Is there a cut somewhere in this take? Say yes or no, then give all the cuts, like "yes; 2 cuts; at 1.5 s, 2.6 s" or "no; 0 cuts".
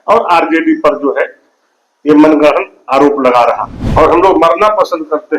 yes; 1 cut; at 3.7 s